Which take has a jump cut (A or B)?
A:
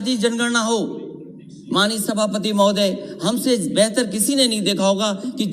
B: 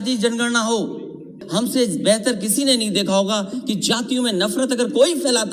B